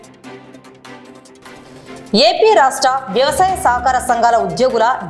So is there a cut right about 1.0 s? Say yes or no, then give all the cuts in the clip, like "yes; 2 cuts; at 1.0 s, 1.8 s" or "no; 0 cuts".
yes; 1 cut; at 1.0 s